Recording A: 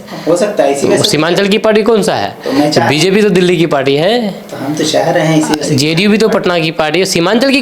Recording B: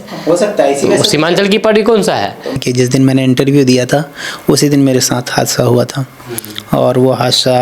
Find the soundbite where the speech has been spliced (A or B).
B